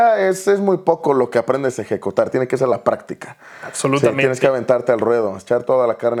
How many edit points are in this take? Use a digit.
0